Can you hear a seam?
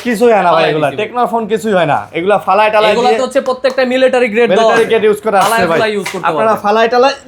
no; 0 cuts

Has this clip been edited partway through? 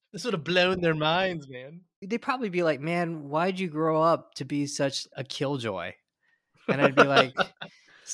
no; 0 cuts

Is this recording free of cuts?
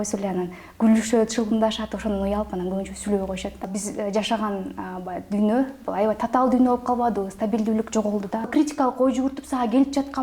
no; 2 cuts; at 3.7 s, 8.5 s

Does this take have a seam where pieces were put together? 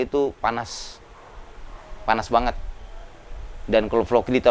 no; 0 cuts

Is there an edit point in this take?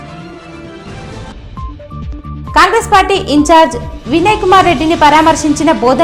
yes; 1 cut; at 1.2 s

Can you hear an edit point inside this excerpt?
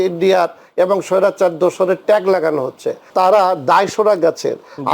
yes; 1 cut; at 3.1 s

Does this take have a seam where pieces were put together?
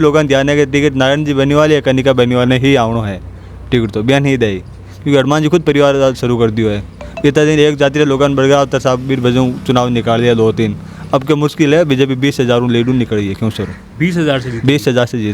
no; 0 cuts

